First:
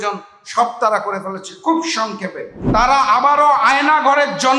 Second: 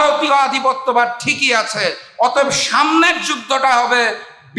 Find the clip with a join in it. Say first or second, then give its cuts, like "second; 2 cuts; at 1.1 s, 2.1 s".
first; 1 cut; at 2.5 s